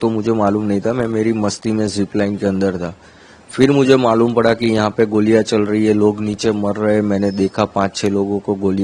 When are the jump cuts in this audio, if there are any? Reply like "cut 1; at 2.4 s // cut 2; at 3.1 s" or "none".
none